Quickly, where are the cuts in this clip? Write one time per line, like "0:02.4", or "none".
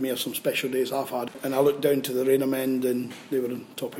0:01.3